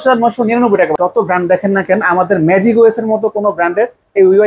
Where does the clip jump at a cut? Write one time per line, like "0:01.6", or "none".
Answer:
0:00.9